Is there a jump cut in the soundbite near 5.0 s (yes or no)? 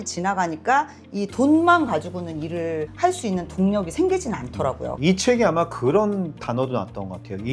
yes